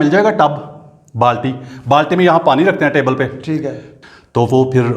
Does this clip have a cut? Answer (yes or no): yes